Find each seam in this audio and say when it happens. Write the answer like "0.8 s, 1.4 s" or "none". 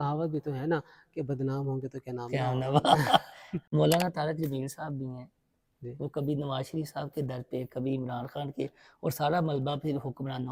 none